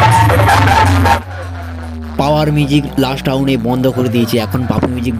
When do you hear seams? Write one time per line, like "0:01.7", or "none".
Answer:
0:01.2